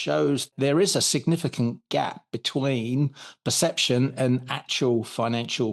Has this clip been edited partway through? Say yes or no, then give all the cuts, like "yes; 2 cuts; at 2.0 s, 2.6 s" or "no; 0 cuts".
no; 0 cuts